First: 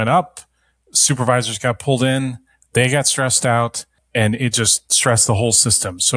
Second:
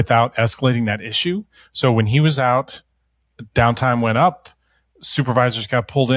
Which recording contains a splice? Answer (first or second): first